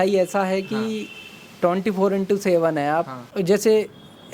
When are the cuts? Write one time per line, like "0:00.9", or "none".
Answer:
0:03.2